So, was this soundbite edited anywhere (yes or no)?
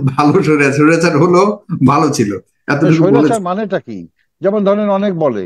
no